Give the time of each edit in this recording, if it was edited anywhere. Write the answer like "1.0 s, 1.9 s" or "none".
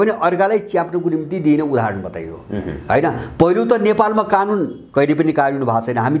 none